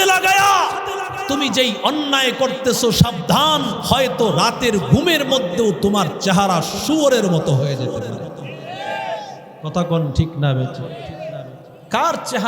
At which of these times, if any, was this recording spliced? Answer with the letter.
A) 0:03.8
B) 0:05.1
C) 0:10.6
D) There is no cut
A